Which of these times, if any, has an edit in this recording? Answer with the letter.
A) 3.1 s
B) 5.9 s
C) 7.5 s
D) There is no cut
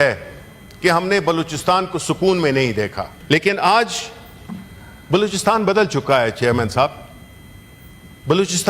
A